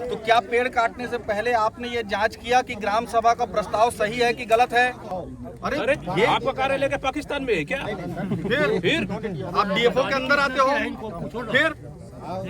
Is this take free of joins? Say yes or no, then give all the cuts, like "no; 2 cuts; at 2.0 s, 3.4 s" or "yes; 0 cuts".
no; 1 cut; at 5.0 s